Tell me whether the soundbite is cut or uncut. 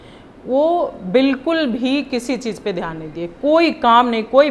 uncut